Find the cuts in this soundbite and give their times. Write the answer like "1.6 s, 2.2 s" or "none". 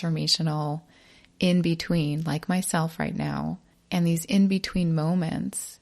3.7 s